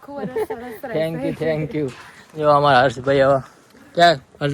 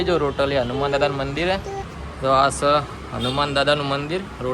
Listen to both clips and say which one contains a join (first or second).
second